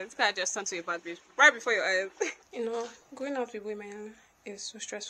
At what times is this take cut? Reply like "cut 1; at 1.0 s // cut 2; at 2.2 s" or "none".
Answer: cut 1; at 2.4 s